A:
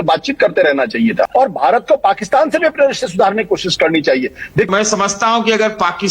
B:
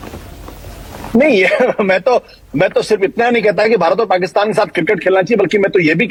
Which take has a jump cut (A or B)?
A